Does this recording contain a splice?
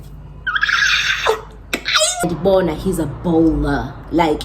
yes; 1 cut; at 2.3 s

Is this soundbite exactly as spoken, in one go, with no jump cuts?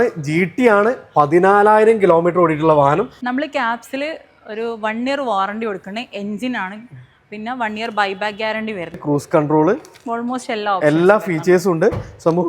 no; 2 cuts; at 3.2 s, 9.0 s

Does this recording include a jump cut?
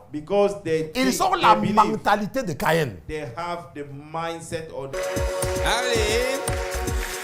yes; 1 cut; at 4.9 s

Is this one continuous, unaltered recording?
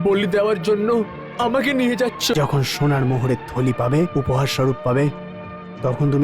no; 1 cut; at 2.3 s

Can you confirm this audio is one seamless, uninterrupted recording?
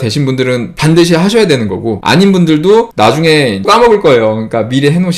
yes; 0 cuts

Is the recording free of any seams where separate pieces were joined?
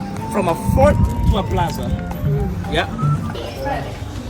no; 1 cut; at 3.4 s

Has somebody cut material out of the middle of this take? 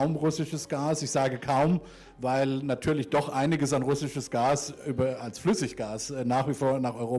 no; 0 cuts

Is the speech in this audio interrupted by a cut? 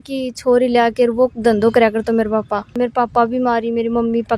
yes; 1 cut; at 2.7 s

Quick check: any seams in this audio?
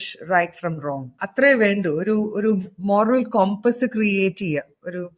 yes; 1 cut; at 1.2 s

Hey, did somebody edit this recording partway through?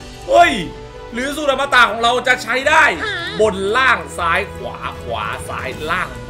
no; 0 cuts

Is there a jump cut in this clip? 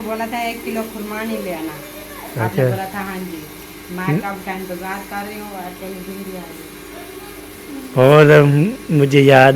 no; 0 cuts

